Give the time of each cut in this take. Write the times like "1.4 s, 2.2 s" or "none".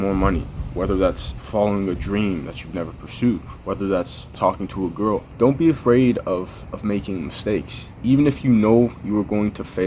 1.4 s, 4.3 s, 5.5 s